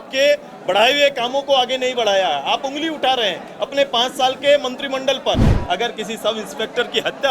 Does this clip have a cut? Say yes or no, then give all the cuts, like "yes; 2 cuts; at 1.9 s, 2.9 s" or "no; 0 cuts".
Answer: yes; 1 cut; at 5.5 s